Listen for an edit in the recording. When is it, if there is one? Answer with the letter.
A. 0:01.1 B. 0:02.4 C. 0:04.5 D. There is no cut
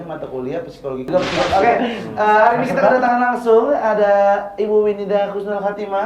A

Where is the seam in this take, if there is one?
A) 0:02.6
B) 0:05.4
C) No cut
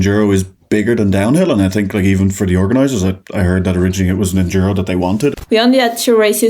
B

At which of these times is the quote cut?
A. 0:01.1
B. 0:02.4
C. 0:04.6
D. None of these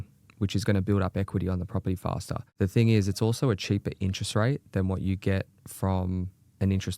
B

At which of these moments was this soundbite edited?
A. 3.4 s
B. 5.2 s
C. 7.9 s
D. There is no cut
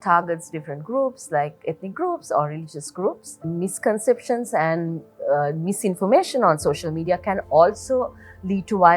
A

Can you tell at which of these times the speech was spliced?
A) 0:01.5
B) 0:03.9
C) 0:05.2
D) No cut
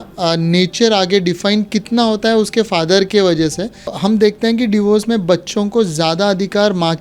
B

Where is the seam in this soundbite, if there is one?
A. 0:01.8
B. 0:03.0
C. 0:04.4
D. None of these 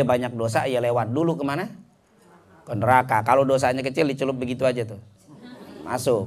D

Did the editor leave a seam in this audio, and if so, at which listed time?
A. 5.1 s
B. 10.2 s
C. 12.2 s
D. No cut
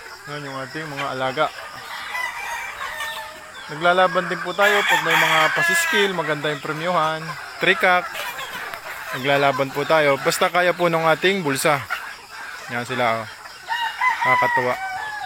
D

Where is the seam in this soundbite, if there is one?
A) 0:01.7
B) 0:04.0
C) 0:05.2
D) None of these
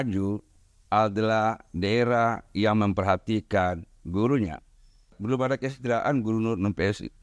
C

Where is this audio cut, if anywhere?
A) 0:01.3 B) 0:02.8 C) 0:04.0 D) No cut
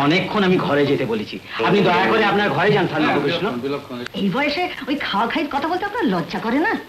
C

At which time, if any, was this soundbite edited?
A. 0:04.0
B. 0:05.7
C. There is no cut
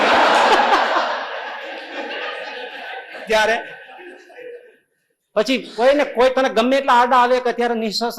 C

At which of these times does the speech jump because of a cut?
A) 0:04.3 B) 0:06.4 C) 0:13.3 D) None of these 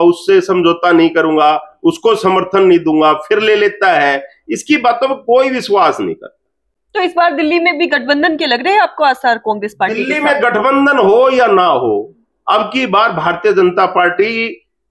D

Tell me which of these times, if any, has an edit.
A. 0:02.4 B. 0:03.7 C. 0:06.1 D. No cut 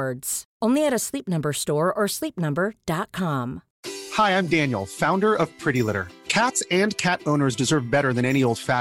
B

